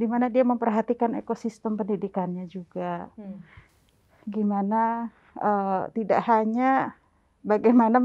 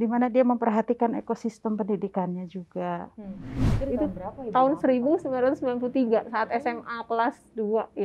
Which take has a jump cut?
second; 1 cut; at 3.7 s

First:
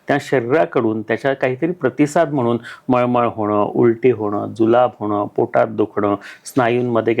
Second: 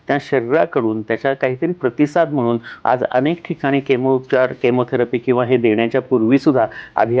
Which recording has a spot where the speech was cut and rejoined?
second; 1 cut; at 2.7 s

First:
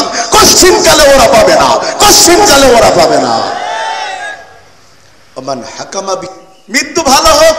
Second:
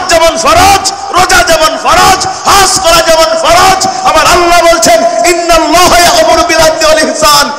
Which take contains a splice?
first; 1 cut; at 6.3 s

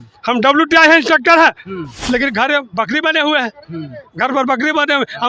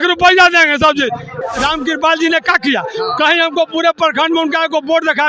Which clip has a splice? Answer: second; 1 cut; at 1.4 s

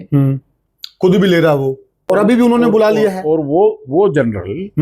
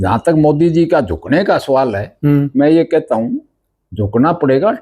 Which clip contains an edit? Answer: first; 1 cut; at 1.9 s

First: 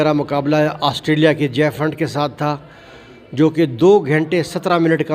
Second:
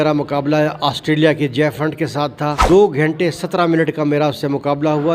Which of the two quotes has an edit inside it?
second; 1 cut; at 2.6 s

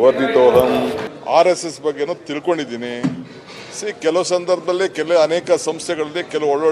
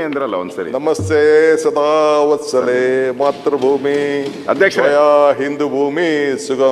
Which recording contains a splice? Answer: first; 1 cut; at 1.1 s

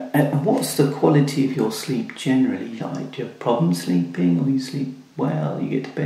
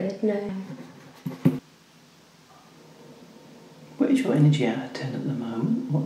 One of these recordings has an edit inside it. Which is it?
second; 1 cut; at 1.8 s

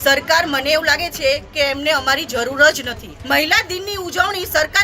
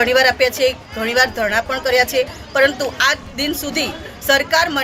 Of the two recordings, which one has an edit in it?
first; 1 cut; at 3.1 s

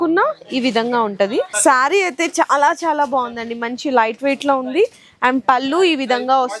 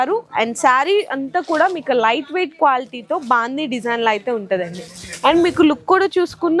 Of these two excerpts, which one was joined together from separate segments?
first; 1 cut; at 1.5 s

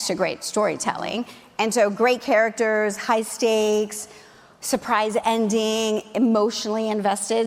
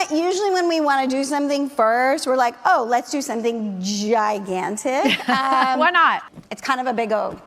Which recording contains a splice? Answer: second; 1 cut; at 6.3 s

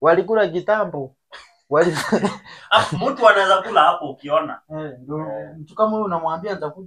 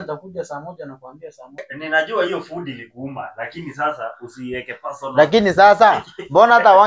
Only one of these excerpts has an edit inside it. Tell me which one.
second; 1 cut; at 1.7 s

